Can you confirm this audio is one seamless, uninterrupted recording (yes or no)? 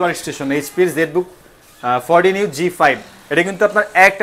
yes